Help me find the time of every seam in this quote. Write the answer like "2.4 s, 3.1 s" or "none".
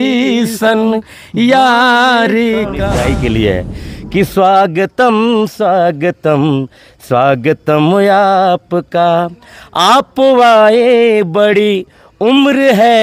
2.9 s

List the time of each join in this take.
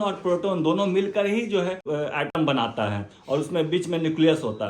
1.9 s

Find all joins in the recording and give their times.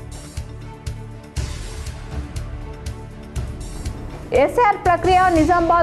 1.8 s

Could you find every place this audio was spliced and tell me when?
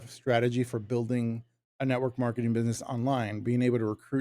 none

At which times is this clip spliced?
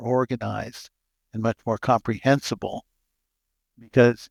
none

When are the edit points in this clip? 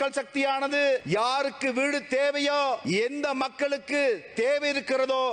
1.0 s, 2.8 s

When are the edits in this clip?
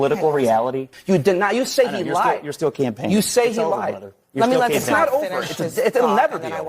0.9 s

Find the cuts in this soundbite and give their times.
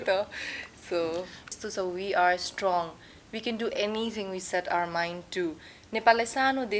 1.5 s

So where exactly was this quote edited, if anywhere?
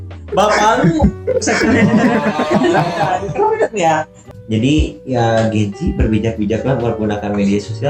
4.2 s

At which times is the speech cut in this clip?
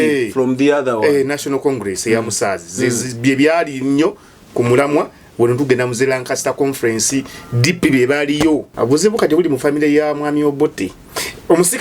8.7 s

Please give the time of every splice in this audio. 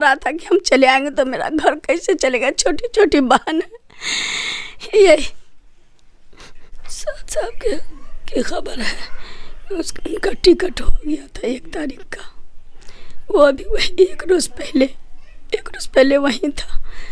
6.7 s

